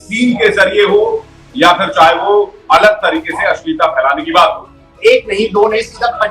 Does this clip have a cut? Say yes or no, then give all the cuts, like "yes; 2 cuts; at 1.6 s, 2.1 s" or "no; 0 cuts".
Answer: yes; 1 cut; at 4.9 s